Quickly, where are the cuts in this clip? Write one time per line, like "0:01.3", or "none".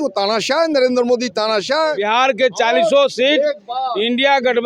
0:02.0

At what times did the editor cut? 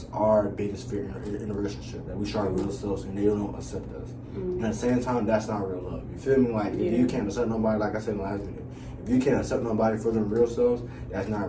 none

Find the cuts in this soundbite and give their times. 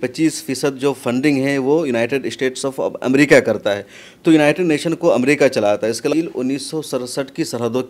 0:06.1

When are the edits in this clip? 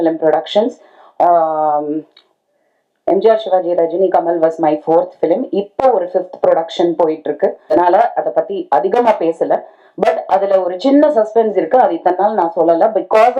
0:07.7

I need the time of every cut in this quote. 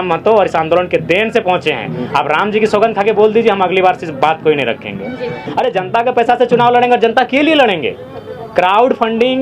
0:05.4

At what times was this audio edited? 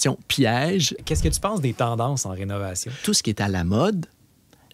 0:01.0
0:02.8

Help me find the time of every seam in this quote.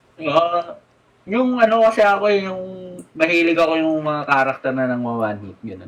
none

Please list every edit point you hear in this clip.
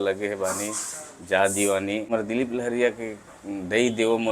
0:02.1

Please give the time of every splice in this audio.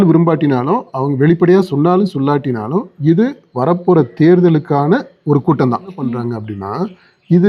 0:06.0

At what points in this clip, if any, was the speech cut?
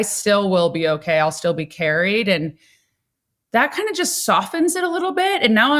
none

